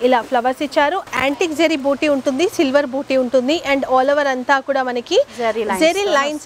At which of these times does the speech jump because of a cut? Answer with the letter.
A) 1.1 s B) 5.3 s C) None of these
A